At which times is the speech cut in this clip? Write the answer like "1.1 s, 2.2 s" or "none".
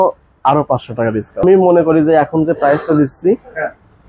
1.4 s